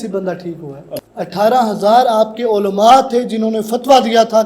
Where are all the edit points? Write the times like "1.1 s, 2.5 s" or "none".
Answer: 1.1 s